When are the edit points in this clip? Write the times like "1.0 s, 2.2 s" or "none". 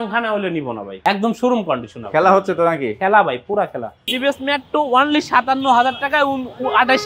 1.0 s, 4.1 s